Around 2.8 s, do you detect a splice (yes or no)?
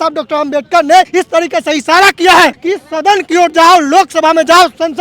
no